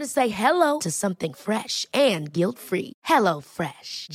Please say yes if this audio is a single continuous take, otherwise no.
yes